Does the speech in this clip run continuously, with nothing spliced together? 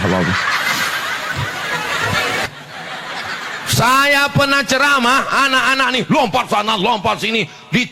no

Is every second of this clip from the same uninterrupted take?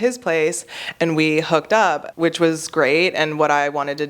no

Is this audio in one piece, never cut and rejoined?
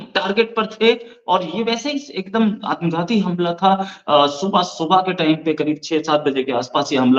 yes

